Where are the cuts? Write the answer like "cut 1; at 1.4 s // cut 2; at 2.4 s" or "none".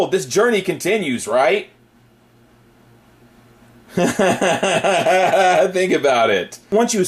cut 1; at 1.4 s